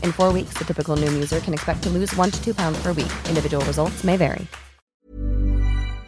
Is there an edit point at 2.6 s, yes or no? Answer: no